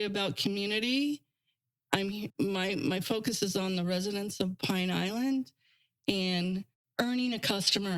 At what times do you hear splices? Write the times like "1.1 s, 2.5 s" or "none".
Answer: 2.3 s, 6.8 s